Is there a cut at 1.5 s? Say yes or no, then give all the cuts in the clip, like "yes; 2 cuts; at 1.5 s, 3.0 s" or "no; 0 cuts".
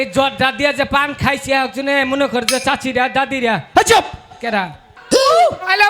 no; 1 cut; at 4.9 s